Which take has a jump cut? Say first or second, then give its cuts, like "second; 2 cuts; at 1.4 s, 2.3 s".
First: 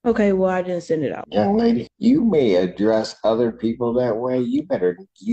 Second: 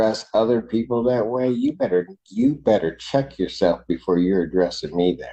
first; 2 cuts; at 1.2 s, 1.9 s